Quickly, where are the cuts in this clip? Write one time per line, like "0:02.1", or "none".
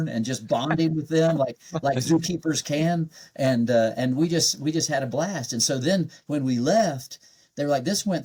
none